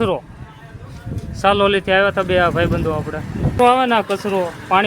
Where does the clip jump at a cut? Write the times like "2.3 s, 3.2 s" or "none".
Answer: 3.5 s